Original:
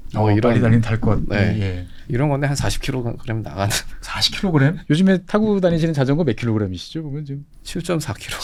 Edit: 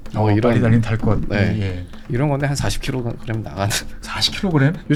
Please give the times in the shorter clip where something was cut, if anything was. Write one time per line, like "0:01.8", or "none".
none